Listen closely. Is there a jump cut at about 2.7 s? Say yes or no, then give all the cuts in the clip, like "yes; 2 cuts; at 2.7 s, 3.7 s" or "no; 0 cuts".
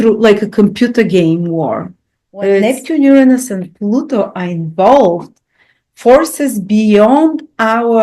yes; 1 cut; at 2.7 s